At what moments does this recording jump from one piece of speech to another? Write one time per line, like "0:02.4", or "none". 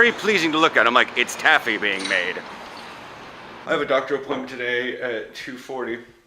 0:03.6